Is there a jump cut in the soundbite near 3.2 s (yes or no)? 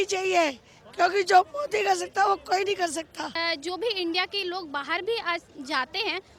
yes